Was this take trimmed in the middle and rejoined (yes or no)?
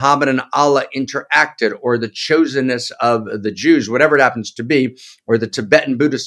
no